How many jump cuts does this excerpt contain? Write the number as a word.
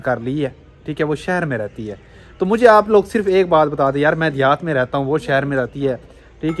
zero